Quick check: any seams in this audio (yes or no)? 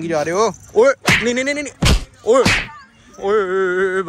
no